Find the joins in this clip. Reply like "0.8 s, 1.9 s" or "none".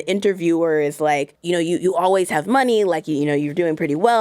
1.3 s

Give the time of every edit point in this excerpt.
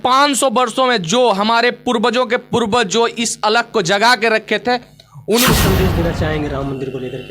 5.5 s

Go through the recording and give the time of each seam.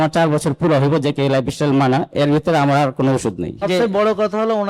3.7 s

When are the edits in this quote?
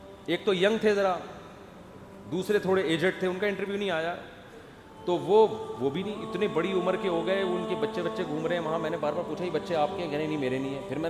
none

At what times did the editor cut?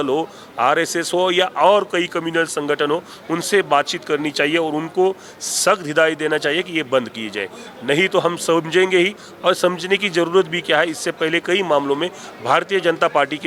none

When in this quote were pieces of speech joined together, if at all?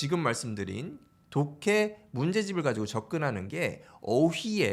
none

